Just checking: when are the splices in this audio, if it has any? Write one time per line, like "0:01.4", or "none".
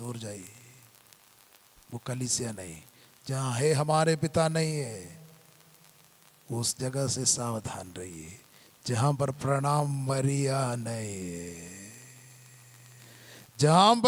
0:13.0